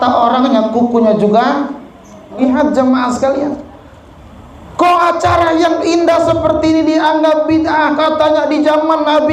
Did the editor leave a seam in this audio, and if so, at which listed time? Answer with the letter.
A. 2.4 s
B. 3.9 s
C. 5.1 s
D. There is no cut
A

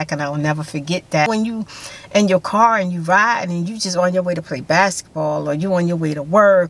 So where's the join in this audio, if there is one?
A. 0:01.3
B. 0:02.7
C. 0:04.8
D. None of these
A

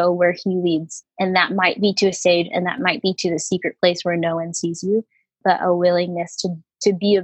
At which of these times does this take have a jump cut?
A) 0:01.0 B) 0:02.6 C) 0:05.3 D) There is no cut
A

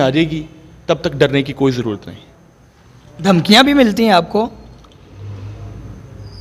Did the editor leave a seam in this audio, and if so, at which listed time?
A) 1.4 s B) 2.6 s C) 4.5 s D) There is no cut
D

